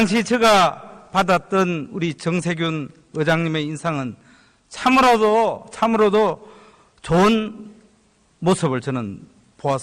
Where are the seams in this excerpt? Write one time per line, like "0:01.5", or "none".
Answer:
0:07.0